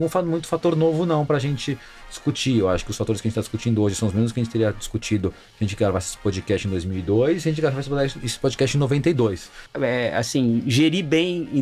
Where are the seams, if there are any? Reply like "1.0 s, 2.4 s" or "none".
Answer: 9.6 s

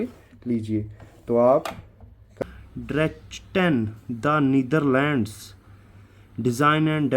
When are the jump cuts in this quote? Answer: 2.4 s

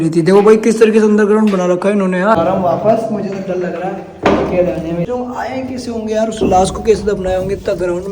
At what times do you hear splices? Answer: 2.4 s, 5.1 s

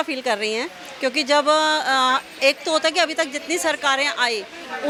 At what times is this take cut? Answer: none

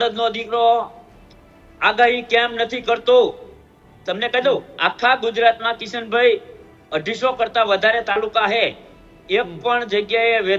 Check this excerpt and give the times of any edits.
none

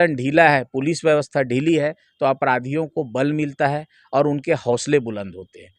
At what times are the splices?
none

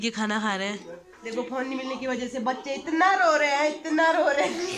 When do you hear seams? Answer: 1.3 s

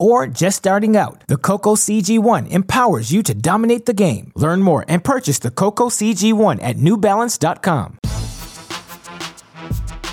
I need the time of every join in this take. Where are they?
8.0 s

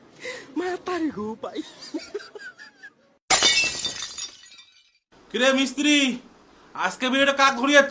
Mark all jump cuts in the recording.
1.8 s

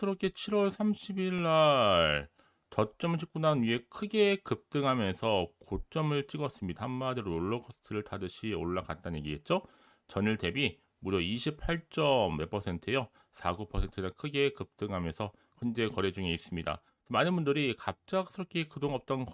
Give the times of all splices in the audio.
15.4 s

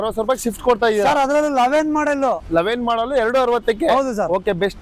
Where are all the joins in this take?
none

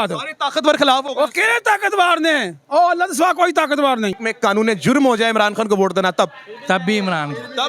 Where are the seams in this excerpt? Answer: 4.2 s

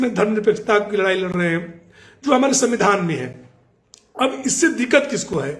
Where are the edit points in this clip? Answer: none

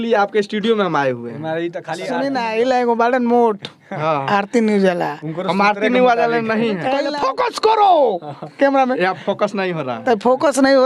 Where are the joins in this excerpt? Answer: 2.1 s, 7.0 s

